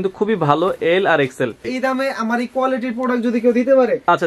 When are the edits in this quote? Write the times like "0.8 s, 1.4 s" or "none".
1.6 s